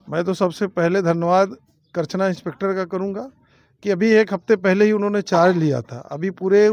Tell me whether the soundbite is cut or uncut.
uncut